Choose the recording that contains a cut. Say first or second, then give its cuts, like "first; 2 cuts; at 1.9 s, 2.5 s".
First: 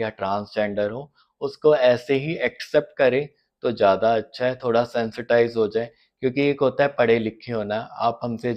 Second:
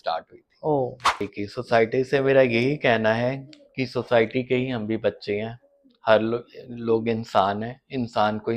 second; 1 cut; at 1.1 s